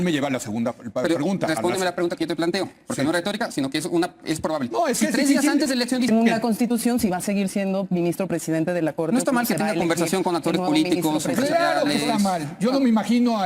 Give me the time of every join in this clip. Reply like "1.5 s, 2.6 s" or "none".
6.1 s